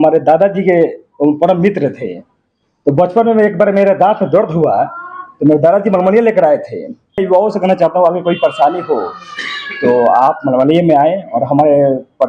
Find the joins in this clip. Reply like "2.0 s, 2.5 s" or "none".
none